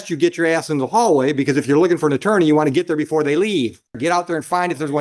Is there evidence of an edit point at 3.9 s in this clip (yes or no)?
yes